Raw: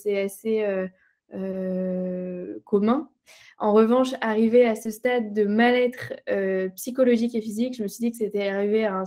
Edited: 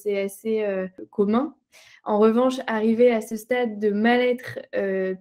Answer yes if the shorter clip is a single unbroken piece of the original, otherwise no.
no